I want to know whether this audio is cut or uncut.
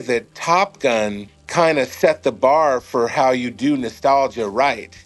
uncut